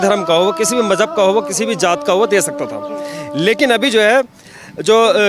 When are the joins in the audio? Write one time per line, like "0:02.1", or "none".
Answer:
none